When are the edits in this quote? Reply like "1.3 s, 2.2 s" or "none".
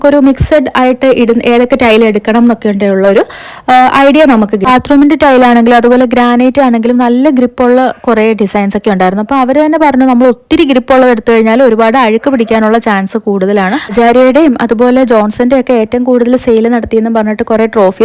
4.7 s, 13.9 s